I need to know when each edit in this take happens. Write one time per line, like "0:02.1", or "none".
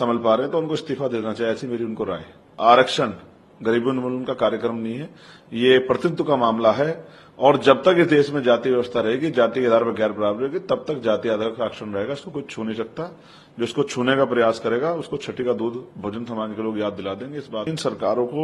0:02.5
0:17.7